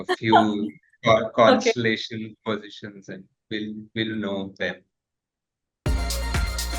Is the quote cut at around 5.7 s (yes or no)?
yes